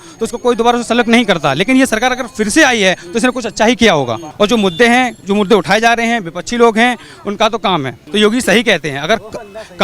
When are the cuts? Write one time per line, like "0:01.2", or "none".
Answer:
0:04.2
0:08.0